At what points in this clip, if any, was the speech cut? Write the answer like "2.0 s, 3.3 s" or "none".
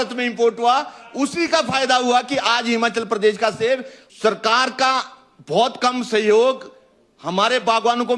4.0 s